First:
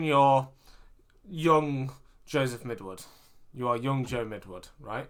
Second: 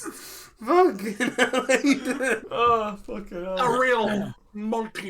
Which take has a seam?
second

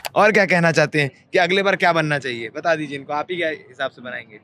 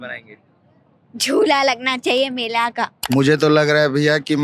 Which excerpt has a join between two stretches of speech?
second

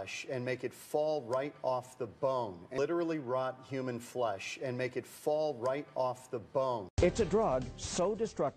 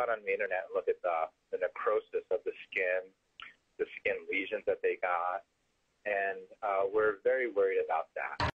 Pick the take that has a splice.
first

